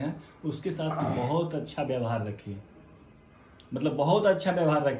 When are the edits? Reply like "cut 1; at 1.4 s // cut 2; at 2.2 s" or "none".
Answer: none